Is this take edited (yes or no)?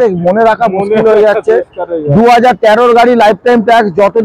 no